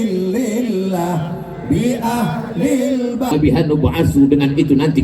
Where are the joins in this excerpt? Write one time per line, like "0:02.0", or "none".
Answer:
0:03.3